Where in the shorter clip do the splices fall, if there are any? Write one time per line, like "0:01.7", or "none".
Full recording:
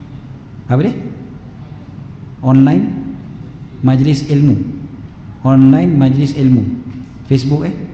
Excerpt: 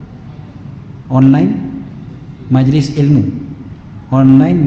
none